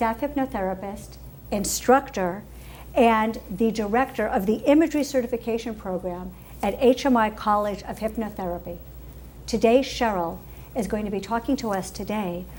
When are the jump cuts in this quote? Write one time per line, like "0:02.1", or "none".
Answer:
none